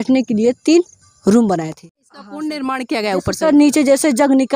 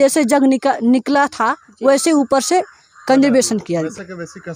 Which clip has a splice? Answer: first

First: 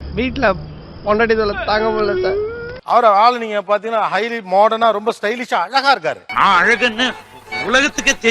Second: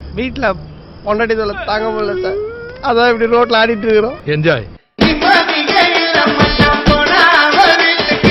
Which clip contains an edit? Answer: first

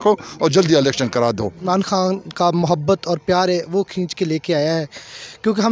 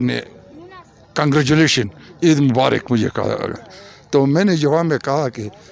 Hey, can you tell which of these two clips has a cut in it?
first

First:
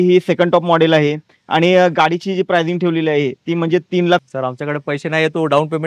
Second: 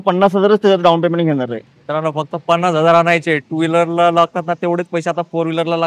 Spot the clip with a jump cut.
first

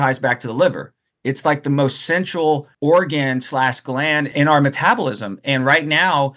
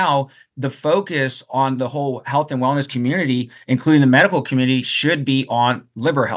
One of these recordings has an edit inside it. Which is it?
first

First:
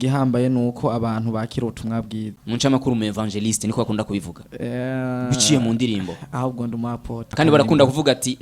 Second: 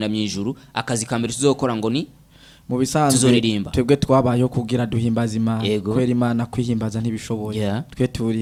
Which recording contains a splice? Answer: first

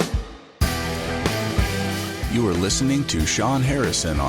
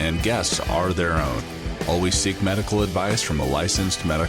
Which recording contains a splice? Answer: first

